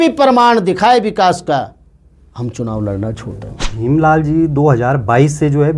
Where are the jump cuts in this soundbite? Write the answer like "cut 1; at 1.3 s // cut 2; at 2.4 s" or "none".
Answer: cut 1; at 3.7 s